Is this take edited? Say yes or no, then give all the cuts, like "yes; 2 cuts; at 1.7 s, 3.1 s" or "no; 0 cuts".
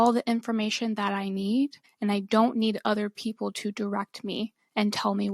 yes; 1 cut; at 1.8 s